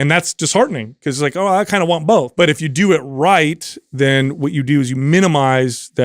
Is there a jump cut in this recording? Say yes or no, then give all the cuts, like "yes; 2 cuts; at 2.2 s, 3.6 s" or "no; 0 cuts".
yes; 1 cut; at 2.3 s